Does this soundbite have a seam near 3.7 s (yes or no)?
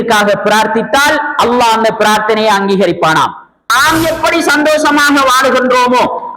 yes